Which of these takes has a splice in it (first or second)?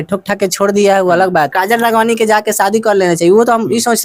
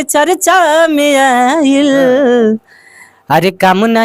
first